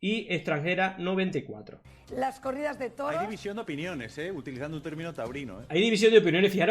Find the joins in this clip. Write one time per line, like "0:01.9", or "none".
0:01.8